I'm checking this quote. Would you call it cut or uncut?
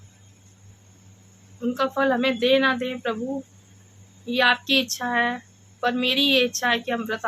uncut